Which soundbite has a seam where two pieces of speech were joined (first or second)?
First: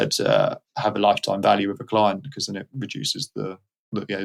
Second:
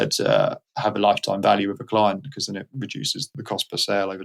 second